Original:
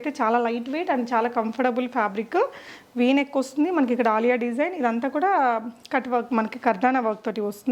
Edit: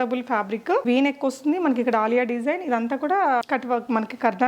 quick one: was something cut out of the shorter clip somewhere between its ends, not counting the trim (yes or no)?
yes